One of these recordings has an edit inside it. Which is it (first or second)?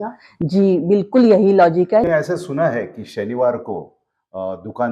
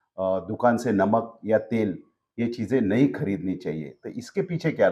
first